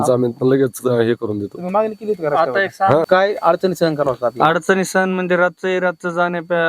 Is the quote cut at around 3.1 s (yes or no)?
yes